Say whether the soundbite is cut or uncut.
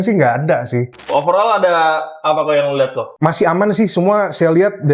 cut